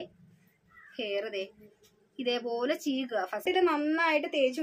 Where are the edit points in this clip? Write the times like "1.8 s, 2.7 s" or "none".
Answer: 3.4 s